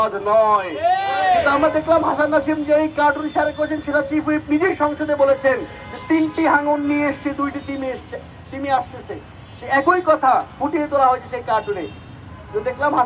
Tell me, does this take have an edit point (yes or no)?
yes